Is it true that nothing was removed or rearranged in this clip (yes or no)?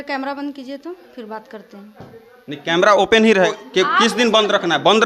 no